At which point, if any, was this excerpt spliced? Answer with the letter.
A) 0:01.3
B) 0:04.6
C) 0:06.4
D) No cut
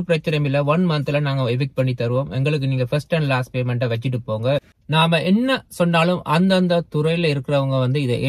B